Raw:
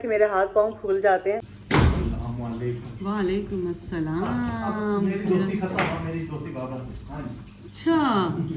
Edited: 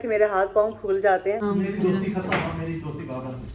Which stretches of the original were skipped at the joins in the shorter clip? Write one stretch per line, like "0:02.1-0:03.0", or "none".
0:01.4-0:04.9